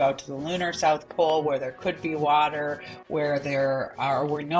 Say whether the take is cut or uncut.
uncut